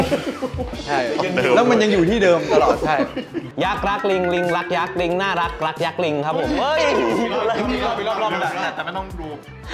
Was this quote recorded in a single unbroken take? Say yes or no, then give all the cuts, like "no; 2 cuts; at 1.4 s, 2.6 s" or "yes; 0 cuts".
no; 1 cut; at 3.5 s